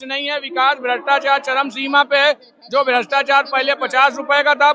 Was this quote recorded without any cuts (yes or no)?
yes